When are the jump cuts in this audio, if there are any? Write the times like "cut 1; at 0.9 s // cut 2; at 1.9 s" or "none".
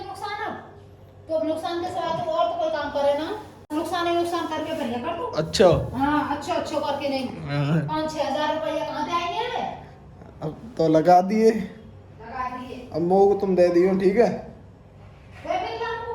cut 1; at 3.7 s